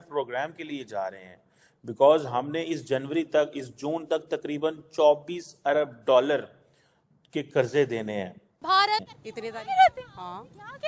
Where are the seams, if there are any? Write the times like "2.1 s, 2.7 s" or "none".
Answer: 8.8 s